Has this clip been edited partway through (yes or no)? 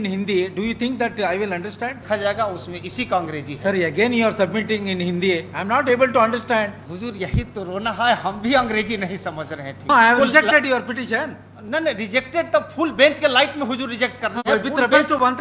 yes